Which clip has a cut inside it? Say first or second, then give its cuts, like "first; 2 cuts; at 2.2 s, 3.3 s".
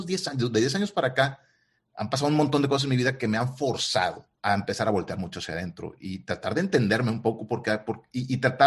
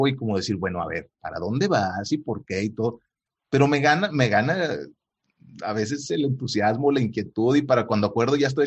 first; 1 cut; at 4.3 s